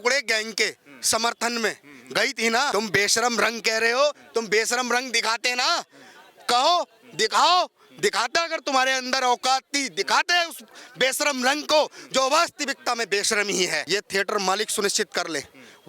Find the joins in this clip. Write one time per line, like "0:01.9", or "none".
0:02.7
0:13.8

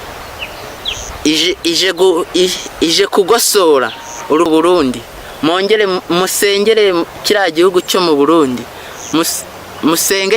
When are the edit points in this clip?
0:04.5

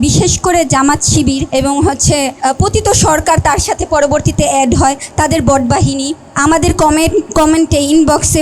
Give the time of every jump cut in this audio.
0:01.5
0:02.4
0:06.2

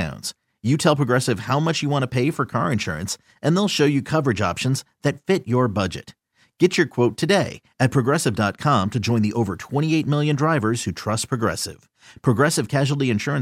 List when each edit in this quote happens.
none

